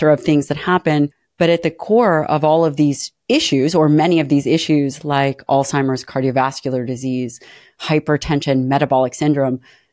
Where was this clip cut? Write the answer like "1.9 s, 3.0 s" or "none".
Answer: 1.2 s, 3.1 s